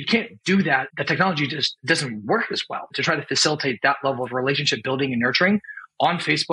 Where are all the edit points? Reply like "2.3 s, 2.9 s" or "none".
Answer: 0.9 s, 1.7 s, 2.9 s